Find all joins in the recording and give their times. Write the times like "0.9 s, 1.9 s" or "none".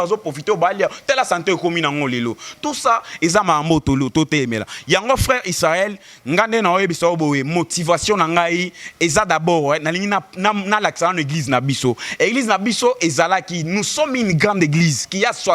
none